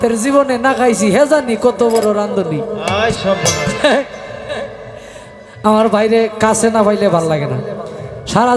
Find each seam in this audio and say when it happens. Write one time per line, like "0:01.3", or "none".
none